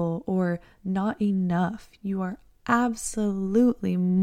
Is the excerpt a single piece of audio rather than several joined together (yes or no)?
yes